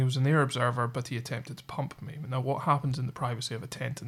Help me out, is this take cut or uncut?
uncut